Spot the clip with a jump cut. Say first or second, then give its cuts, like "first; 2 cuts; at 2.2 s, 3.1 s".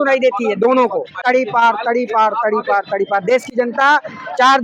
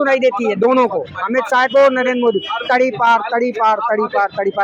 first; 1 cut; at 1.1 s